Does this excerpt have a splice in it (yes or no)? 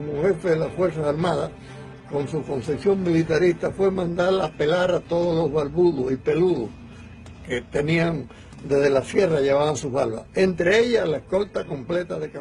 no